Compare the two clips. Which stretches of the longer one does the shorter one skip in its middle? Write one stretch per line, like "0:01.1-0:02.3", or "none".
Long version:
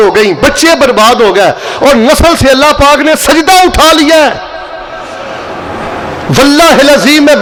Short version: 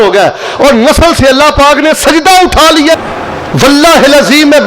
0:04.2-0:05.7

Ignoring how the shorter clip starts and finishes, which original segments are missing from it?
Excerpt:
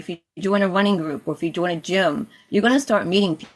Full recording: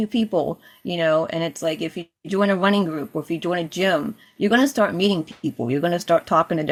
none

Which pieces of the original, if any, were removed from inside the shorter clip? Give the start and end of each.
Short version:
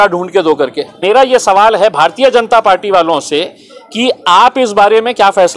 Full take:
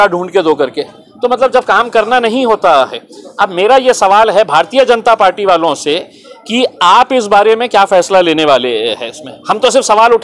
0:01.0-0:03.5

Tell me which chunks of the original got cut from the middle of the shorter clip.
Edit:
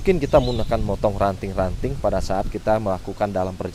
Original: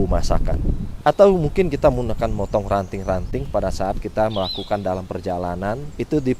none

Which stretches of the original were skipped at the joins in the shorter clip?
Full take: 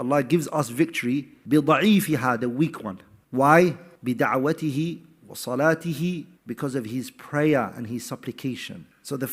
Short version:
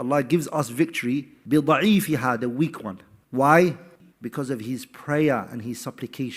0:04.0-0:06.2

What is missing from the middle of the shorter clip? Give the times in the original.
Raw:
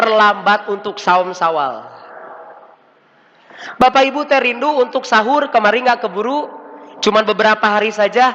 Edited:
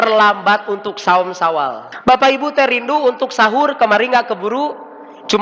0:01.9-0:03.6

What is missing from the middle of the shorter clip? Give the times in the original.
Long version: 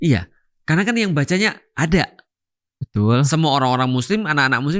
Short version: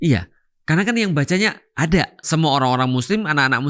0:02.3-0:03.3

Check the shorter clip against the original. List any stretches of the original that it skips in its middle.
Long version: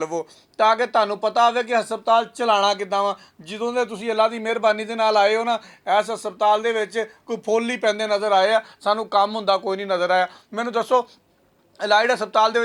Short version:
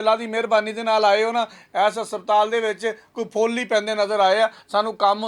none

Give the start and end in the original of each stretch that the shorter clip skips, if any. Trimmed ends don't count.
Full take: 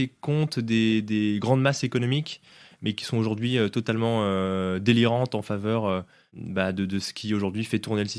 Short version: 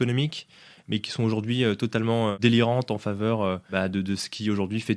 0:04.3-0:04.8
0:06.1-0:06.5

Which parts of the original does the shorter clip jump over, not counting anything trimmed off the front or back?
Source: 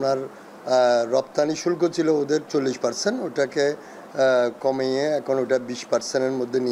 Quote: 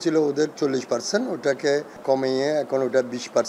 0:03.9-0:04.6

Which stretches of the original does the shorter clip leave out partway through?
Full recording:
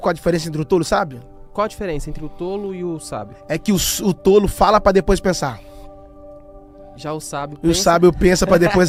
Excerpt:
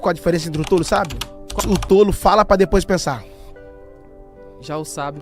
0:01.5-0:03.9

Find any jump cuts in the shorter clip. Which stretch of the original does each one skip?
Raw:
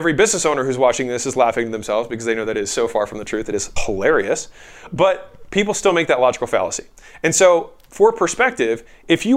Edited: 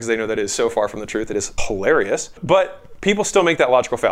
0:04.5-0:04.8

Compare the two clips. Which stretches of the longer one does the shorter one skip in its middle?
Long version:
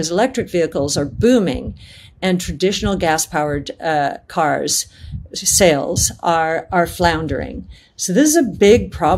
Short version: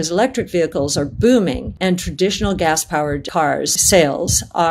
0:01.7-0:02.1
0:03.7-0:05.0

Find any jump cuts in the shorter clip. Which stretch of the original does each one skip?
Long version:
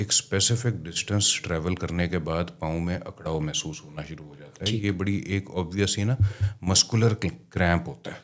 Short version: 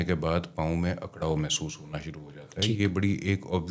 none

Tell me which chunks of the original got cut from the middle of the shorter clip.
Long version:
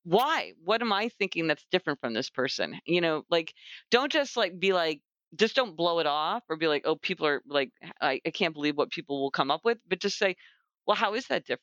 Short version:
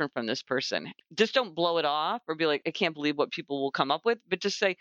0:02.7-0:05.1
0:06.8-0:08.2

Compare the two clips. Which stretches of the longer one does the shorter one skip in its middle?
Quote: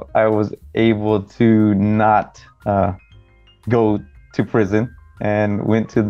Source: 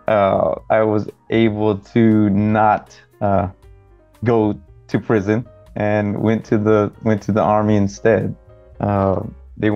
none

